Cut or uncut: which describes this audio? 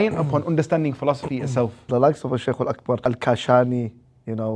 cut